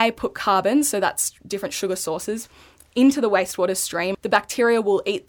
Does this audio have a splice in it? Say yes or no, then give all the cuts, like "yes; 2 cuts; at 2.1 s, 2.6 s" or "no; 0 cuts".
yes; 1 cut; at 4.1 s